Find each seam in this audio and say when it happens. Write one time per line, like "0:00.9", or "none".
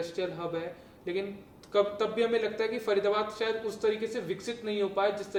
none

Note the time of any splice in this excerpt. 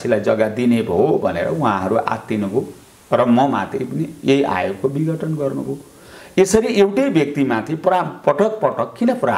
none

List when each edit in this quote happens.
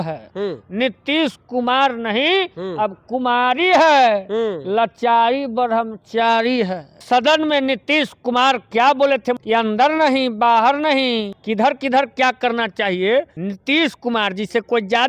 0:07.0
0:09.4
0:11.4
0:13.4

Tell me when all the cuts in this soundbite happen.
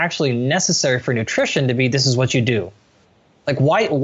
0:02.8

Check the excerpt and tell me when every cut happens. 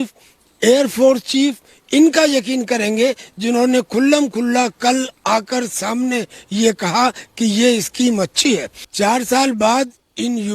0:08.8

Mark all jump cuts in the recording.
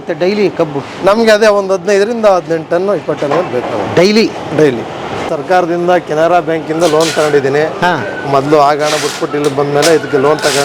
0:05.3

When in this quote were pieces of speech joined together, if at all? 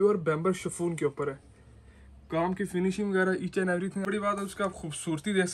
0:04.1

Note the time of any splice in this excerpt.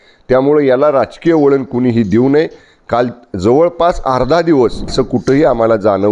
0:04.8

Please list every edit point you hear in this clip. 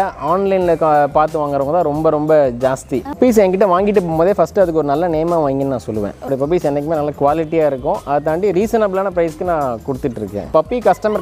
0:03.2
0:06.3
0:10.5

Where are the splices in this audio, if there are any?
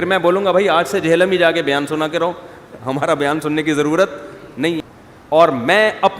0:04.9

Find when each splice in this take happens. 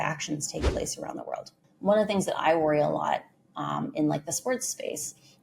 0:01.7

